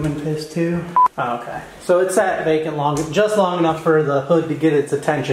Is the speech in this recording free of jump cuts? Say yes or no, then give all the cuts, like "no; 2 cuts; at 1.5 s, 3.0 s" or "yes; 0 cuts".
no; 1 cut; at 1.0 s